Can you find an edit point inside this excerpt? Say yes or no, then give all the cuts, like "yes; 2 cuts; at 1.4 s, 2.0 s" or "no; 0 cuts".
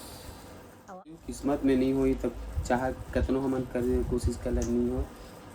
yes; 1 cut; at 1.2 s